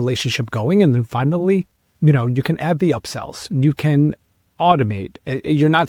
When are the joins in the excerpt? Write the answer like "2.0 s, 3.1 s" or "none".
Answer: none